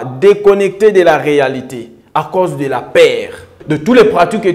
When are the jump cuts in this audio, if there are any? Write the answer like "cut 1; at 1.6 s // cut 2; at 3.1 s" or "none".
cut 1; at 3.6 s

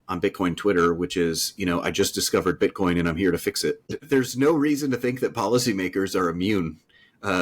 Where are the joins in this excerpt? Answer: cut 1; at 3.9 s

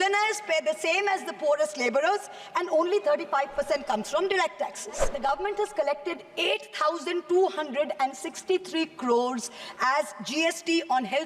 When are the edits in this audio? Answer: cut 1; at 5.1 s

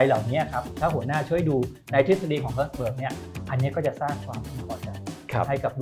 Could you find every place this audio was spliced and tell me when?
none

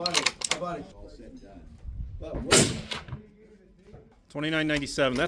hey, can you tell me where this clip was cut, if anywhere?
cut 1; at 0.9 s // cut 2; at 4.1 s

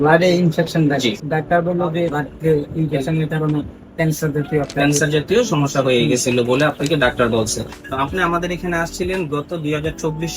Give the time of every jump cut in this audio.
cut 1; at 1.2 s // cut 2; at 2.2 s // cut 3; at 7.8 s

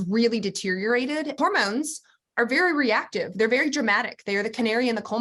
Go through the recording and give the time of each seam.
cut 1; at 1.3 s

